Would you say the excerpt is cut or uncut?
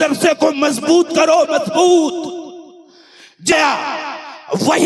cut